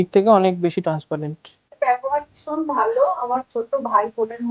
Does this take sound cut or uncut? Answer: cut